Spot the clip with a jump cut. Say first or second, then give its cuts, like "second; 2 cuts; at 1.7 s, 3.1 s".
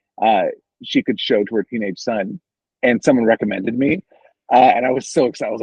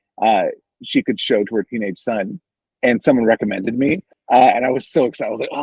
second; 1 cut; at 4.1 s